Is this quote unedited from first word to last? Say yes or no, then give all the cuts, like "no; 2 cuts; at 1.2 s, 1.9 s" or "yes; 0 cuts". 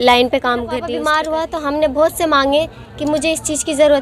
no; 1 cut; at 1.0 s